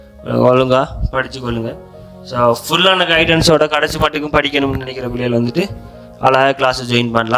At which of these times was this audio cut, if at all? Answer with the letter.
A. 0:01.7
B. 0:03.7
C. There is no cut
C